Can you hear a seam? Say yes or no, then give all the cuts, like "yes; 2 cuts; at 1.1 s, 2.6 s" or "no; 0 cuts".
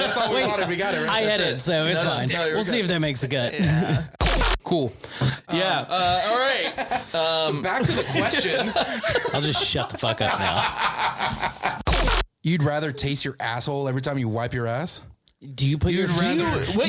yes; 2 cuts; at 4.2 s, 11.8 s